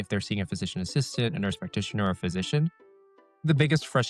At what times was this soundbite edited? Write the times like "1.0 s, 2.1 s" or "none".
2.7 s